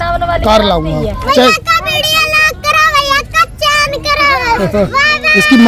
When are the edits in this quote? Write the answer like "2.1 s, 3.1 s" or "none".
1.2 s, 4.9 s